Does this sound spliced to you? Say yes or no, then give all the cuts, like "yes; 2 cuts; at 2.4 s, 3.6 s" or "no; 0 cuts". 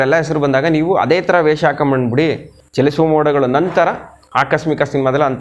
yes; 1 cut; at 2.6 s